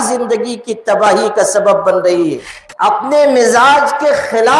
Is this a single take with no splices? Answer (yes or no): no